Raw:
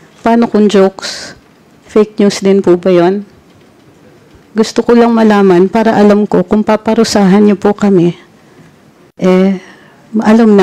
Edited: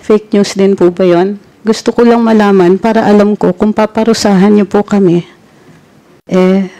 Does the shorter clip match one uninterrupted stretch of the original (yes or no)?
no